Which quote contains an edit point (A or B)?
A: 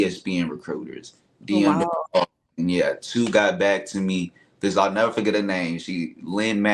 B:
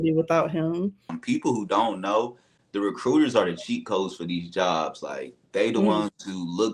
B